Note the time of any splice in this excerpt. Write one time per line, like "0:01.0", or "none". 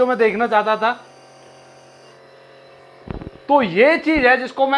0:02.1

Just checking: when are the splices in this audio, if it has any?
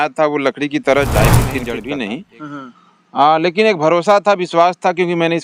0:01.6

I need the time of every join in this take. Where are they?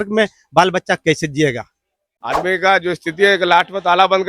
0:01.8

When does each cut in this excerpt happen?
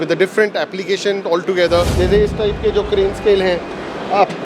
0:01.9

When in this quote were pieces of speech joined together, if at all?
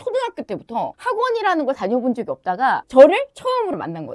none

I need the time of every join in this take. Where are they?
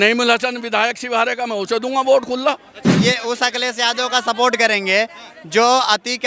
0:02.9

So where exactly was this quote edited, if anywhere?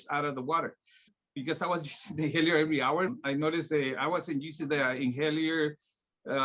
0:01.1
0:03.2

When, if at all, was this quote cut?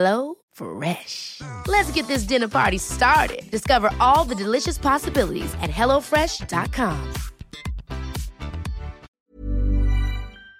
0:09.1

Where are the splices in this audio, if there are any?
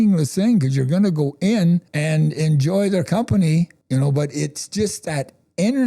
0:01.9
0:03.8

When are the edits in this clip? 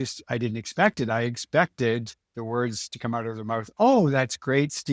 none

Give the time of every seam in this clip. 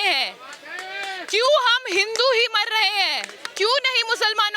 0:03.4

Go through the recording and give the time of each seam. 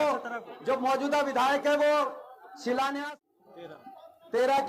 0:03.1

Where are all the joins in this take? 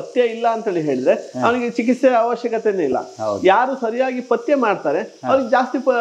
none

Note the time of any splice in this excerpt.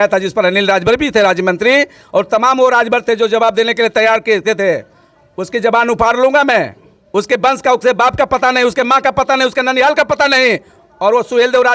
none

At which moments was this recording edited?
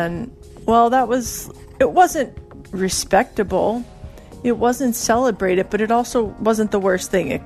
0:06.3

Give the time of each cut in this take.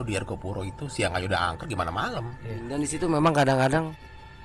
0:02.7

